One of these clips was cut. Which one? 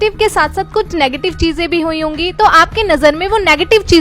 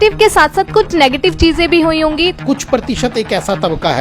second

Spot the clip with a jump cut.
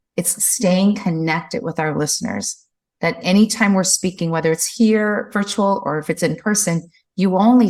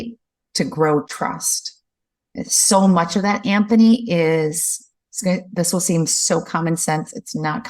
second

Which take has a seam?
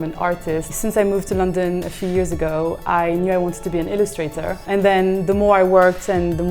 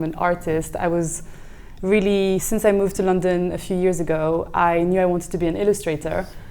first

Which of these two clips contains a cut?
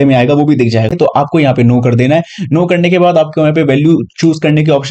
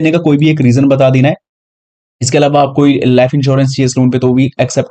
first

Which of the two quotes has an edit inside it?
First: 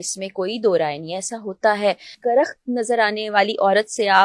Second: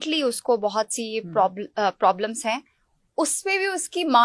first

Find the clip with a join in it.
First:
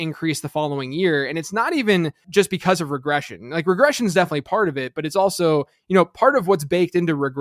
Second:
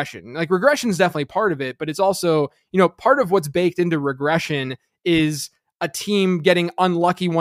first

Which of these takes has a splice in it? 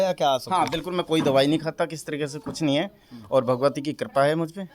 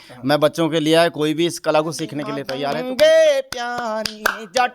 second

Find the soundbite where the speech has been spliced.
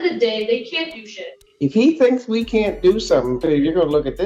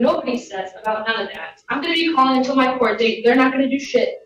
first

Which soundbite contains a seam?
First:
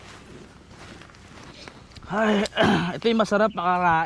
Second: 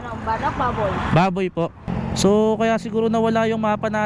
second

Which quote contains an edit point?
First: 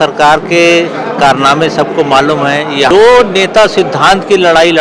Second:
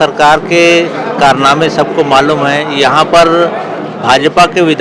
first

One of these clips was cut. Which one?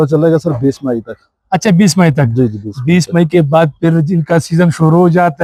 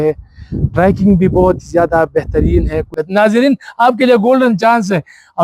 second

